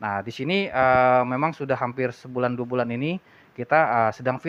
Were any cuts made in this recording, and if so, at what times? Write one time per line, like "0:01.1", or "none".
none